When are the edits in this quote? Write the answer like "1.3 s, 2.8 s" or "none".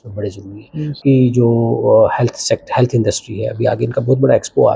1.0 s